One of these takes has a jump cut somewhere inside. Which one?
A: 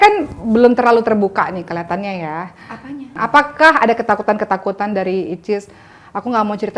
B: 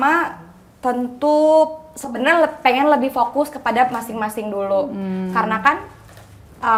A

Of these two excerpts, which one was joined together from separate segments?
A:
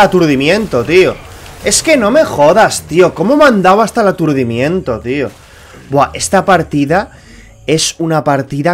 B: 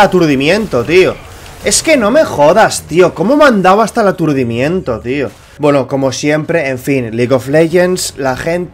B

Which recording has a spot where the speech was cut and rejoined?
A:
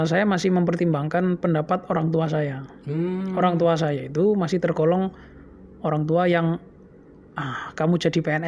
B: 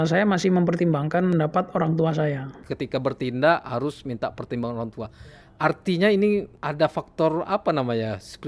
B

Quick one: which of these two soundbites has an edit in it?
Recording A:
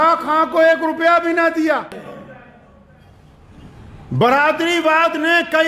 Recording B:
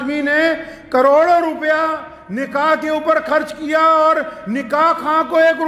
A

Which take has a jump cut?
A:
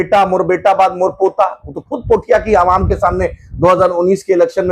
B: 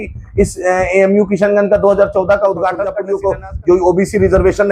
B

